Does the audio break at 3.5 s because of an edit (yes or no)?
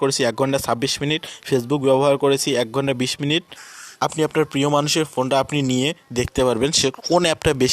yes